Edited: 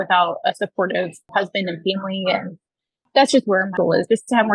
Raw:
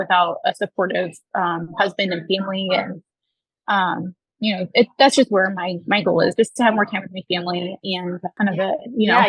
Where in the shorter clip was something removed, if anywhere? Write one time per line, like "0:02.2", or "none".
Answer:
0:01.2
0:03.1
0:03.7